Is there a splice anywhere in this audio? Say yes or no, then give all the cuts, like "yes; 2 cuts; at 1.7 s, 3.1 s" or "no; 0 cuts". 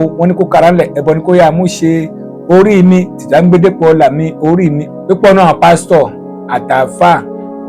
yes; 1 cut; at 4.8 s